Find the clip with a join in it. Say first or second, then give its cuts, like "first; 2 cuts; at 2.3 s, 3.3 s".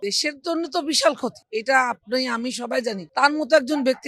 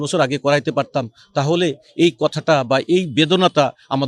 first; 2 cuts; at 1.4 s, 3.0 s